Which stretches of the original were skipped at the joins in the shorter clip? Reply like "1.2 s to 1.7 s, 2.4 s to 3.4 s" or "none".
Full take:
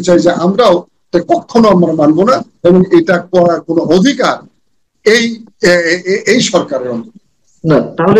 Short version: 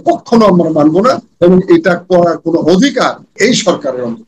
4.6 s to 6.2 s